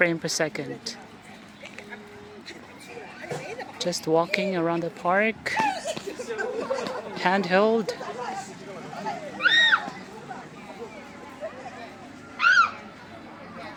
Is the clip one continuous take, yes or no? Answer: yes